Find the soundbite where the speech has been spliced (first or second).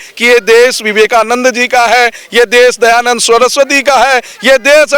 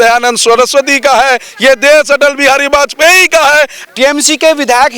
second